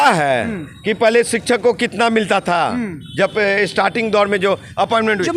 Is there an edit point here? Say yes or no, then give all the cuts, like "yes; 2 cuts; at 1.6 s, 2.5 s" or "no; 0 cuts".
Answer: no; 0 cuts